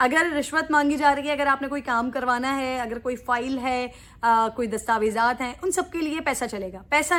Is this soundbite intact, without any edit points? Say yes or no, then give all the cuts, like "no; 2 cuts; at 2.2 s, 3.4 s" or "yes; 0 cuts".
yes; 0 cuts